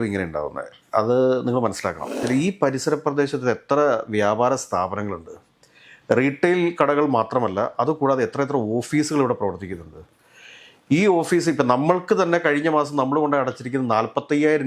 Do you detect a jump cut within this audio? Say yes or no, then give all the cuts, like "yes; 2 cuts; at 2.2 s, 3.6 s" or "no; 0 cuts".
yes; 1 cut; at 2.2 s